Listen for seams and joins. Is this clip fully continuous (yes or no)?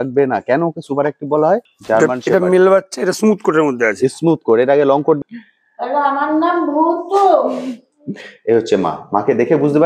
no